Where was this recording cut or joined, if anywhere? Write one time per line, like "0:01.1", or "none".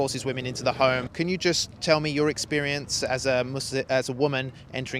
0:01.1